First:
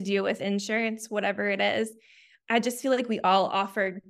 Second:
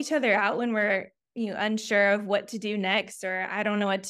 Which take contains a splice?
first; 1 cut; at 2.3 s

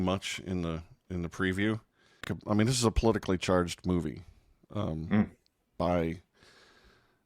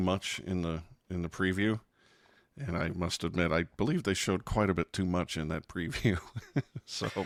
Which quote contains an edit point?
first; 1 cut; at 2.3 s

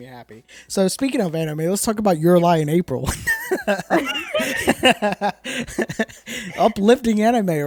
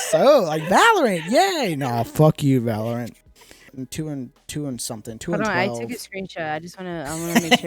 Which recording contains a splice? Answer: second; 1 cut; at 3.7 s

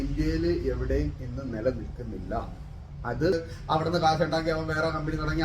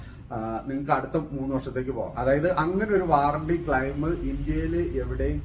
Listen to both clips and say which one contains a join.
first; 1 cut; at 3.3 s

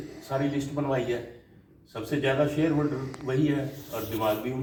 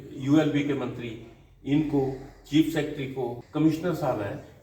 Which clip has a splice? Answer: second; 1 cut; at 3.4 s

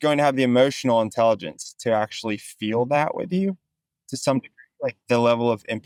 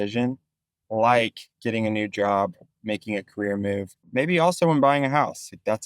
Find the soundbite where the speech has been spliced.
second; 2 cuts; at 1.5 s, 4.1 s

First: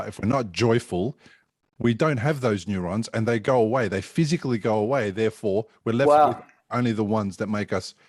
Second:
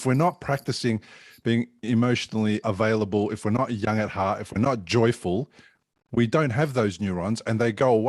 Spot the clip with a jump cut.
second; 1 cut; at 2.6 s

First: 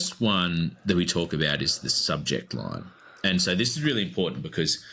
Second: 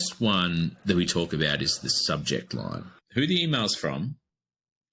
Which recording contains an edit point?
second; 1 cut; at 2.9 s

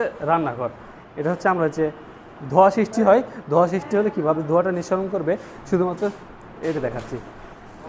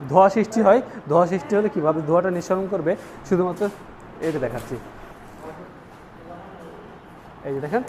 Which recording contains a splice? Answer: first; 1 cut; at 0.9 s

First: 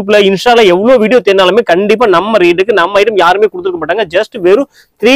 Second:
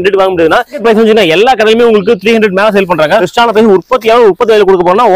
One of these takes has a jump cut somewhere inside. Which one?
second; 2 cuts; at 0.9 s, 3.3 s

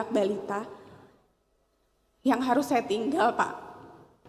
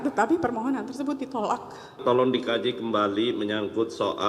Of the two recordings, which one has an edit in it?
second; 1 cut; at 2.0 s

